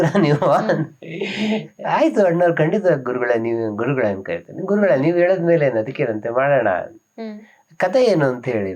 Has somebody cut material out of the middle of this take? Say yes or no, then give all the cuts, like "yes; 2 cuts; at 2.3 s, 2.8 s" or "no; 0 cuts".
no; 0 cuts